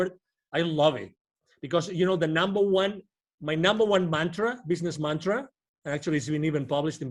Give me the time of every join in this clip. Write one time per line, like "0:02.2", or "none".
none